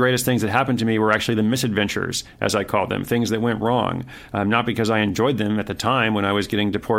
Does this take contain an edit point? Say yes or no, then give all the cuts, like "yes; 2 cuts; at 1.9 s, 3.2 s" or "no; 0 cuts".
no; 0 cuts